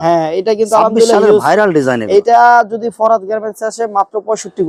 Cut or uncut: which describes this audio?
uncut